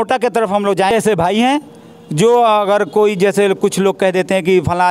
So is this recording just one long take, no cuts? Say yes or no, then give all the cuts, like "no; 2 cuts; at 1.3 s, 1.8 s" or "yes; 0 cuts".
no; 1 cut; at 0.9 s